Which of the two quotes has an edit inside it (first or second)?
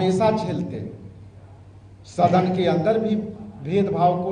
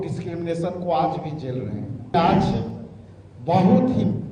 second